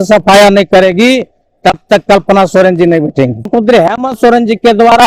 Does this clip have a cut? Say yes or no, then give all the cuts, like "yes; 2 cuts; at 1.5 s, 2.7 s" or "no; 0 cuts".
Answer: yes; 1 cut; at 3.5 s